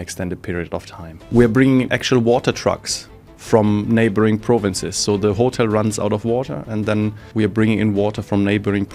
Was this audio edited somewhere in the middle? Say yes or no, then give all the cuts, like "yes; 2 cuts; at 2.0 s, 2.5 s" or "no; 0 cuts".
yes; 2 cuts; at 1.3 s, 7.2 s